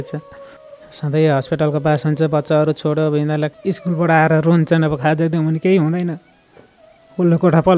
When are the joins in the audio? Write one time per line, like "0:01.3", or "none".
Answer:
0:03.6